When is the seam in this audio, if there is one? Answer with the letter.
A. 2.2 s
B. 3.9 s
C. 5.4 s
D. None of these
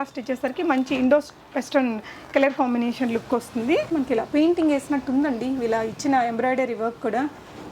B